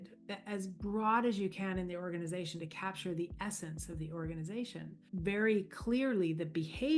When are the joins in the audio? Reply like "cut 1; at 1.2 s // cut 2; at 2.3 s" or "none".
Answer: cut 1; at 5.0 s